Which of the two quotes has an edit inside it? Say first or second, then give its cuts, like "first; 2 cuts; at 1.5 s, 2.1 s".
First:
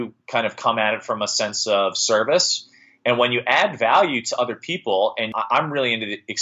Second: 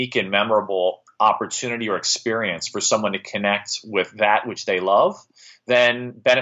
first; 1 cut; at 5.4 s